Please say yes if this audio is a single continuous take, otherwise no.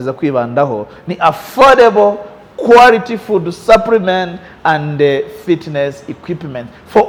yes